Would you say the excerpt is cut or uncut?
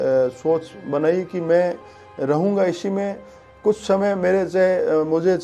uncut